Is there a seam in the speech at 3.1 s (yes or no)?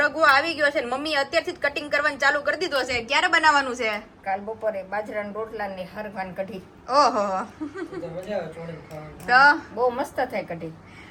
no